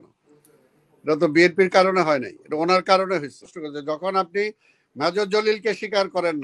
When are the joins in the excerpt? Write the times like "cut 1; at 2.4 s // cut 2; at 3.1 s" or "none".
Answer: cut 1; at 3.6 s